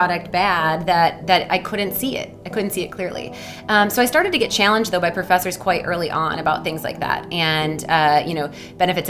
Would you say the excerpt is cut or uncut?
uncut